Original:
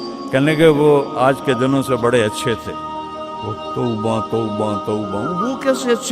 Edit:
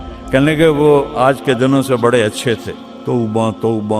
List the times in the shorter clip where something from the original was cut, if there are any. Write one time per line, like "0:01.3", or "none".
0:02.8